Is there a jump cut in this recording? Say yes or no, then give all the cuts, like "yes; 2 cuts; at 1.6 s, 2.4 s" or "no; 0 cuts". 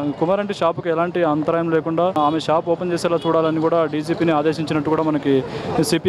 yes; 1 cut; at 2.2 s